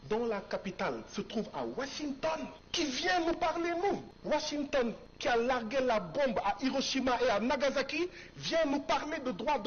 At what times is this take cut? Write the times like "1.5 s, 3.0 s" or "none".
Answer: 2.6 s, 4.1 s, 5.1 s